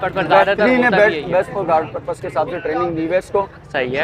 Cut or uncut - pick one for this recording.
uncut